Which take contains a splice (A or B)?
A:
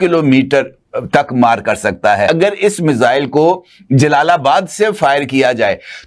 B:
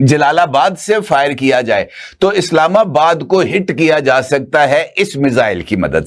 A